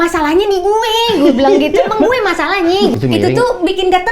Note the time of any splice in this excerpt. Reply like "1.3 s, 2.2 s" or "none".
2.9 s